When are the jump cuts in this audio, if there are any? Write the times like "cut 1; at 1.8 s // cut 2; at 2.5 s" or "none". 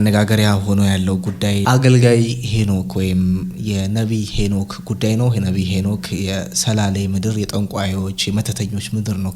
cut 1; at 1.6 s